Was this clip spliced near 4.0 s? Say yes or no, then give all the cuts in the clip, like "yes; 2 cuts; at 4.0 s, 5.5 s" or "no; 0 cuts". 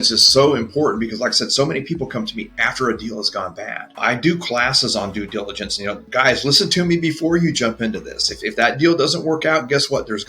yes; 2 cuts; at 4.0 s, 6.0 s